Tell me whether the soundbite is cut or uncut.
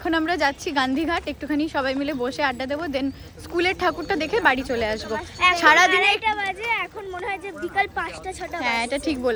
uncut